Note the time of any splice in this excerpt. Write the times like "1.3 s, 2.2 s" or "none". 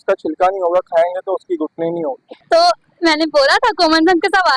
2.3 s